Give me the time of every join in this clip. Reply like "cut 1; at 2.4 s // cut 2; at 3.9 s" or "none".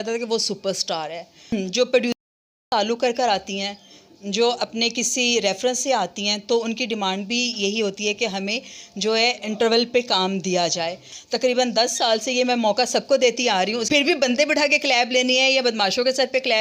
cut 1; at 1.5 s // cut 2; at 11.1 s // cut 3; at 13.8 s